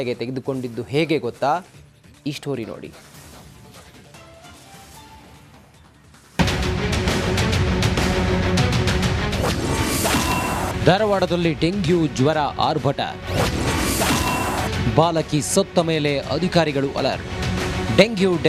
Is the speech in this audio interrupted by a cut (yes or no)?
no